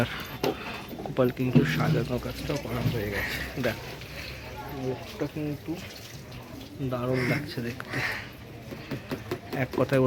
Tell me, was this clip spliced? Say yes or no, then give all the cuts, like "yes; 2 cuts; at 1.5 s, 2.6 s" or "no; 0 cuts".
no; 0 cuts